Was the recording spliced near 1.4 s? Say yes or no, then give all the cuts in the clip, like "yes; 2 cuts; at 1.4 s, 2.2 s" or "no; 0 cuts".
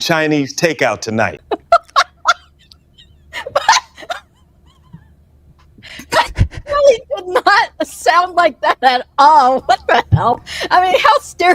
yes; 1 cut; at 1.4 s